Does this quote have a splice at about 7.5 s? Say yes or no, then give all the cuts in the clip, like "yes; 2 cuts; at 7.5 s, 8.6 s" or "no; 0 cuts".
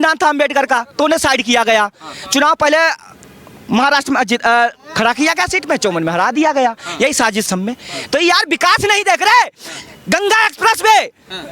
yes; 1 cut; at 7.5 s